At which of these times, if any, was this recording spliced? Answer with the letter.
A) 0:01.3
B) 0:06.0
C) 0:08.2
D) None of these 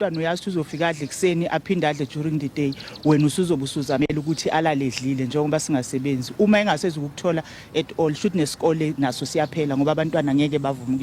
D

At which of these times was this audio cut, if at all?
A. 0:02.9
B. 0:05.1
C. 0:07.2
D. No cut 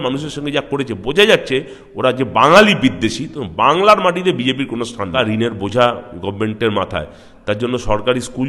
B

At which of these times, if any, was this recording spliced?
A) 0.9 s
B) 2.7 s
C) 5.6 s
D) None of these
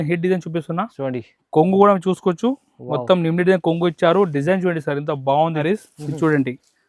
C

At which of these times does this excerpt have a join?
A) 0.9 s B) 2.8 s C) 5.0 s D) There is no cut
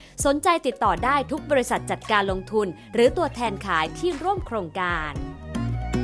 C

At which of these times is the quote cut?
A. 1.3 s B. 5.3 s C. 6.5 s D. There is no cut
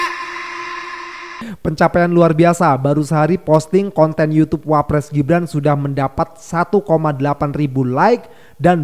A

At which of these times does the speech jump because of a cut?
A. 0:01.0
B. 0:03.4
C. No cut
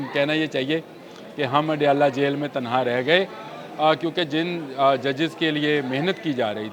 C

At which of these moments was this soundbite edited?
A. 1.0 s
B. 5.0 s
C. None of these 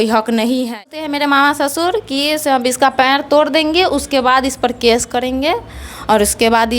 A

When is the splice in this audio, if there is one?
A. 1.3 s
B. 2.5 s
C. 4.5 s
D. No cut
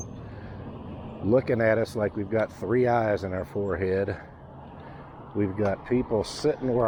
D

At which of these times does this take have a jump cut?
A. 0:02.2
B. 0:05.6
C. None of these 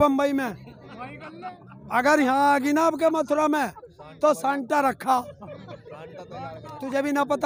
C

